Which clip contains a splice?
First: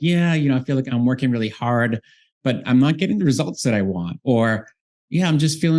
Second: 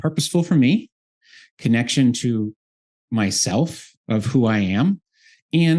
first; 2 cuts; at 0.9 s, 2.6 s

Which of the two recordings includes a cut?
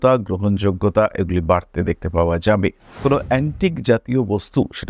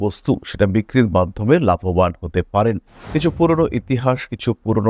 first; 1 cut; at 2.9 s

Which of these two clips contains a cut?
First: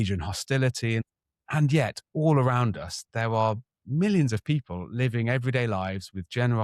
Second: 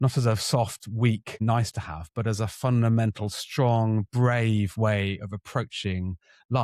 first; 1 cut; at 1.0 s

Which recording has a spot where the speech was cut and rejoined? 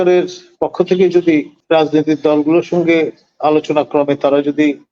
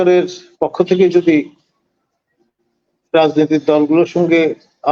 first; 1 cut; at 1.6 s

